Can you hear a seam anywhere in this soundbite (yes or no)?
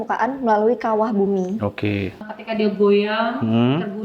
yes